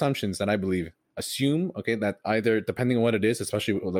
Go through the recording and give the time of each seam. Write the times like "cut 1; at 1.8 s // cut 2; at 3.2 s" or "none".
cut 1; at 1.0 s